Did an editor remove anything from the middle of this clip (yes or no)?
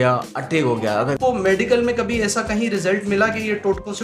yes